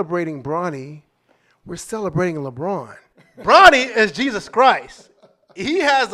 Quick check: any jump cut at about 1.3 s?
no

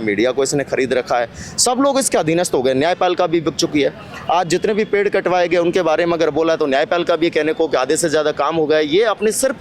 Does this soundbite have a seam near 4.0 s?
no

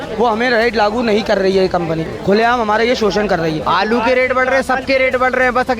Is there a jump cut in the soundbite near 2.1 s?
yes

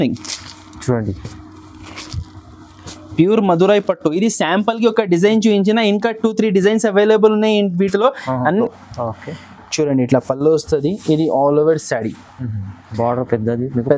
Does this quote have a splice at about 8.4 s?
yes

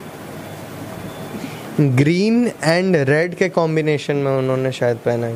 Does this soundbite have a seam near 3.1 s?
no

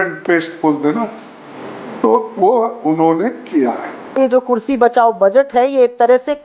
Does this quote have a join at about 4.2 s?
yes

